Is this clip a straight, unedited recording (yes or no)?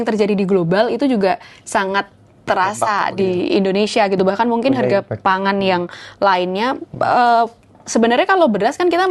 yes